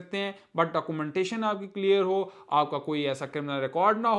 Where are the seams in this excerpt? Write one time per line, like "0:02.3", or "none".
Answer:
none